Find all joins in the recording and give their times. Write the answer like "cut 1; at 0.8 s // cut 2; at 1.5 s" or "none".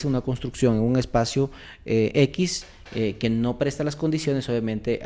none